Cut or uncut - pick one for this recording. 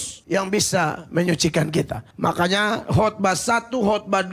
uncut